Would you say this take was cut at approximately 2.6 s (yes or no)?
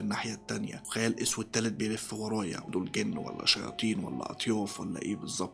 yes